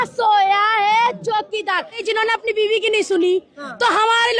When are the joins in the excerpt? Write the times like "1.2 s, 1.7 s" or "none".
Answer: 2.0 s